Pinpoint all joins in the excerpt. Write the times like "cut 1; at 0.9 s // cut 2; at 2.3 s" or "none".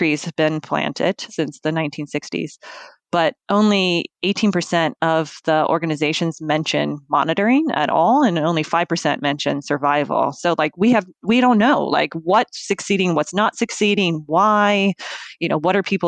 cut 1; at 1.2 s